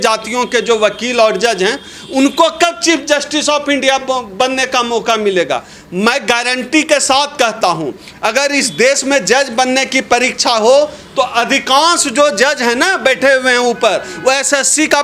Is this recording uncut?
yes; 0 cuts

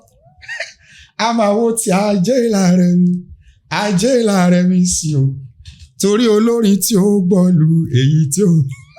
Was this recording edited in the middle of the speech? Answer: no; 0 cuts

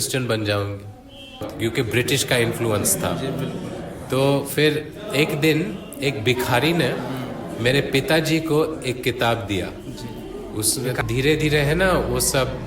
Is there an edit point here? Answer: yes; 2 cuts; at 1.5 s, 11.0 s

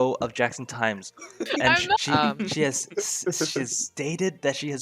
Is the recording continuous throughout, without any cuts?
no; 1 cut; at 2.0 s

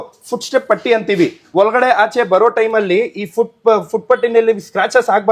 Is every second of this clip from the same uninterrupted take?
yes; 0 cuts

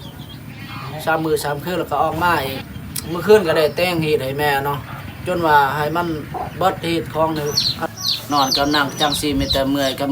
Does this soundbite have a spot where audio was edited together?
yes; 2 cuts; at 2.7 s, 7.9 s

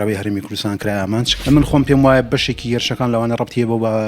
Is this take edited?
yes; 1 cut; at 1.3 s

